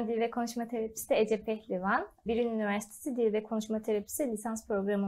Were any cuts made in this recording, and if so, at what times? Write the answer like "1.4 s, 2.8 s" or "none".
2.3 s